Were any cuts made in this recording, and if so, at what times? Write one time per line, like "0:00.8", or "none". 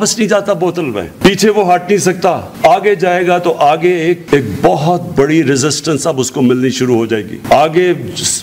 none